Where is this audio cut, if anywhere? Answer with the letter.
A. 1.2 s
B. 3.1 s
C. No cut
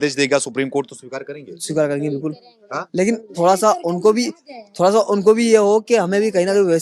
C